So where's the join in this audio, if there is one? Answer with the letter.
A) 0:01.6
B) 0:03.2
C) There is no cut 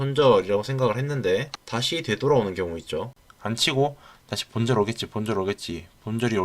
B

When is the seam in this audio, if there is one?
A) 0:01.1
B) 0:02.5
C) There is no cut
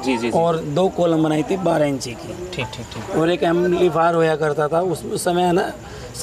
C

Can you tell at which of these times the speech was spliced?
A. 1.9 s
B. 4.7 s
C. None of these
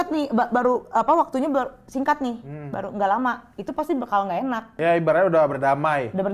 B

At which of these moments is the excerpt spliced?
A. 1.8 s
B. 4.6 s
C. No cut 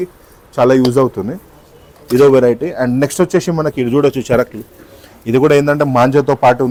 C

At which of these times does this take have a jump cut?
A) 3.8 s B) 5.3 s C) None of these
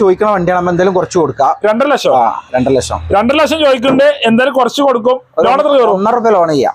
C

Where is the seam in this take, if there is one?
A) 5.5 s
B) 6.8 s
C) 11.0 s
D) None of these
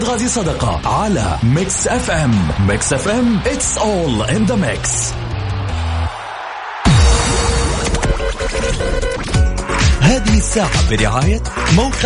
B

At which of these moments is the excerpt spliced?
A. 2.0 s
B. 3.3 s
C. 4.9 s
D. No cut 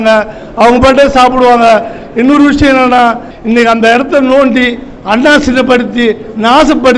B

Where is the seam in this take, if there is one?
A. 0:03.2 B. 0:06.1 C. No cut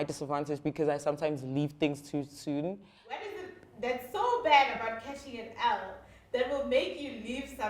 A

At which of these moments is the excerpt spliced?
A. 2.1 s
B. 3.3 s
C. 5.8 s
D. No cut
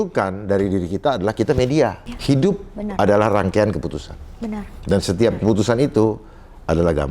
A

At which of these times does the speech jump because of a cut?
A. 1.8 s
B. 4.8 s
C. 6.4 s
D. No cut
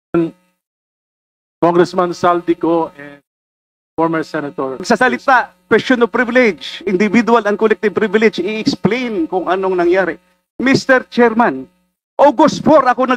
B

